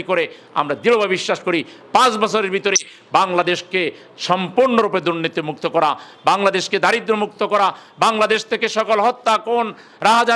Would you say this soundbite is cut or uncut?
uncut